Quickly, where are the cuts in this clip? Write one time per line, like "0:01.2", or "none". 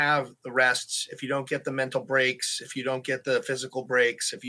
none